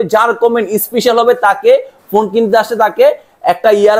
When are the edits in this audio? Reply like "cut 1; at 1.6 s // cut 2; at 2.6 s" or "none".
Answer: none